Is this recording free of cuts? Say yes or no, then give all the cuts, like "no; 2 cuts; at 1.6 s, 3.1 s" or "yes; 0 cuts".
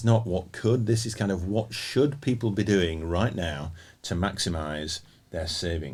yes; 0 cuts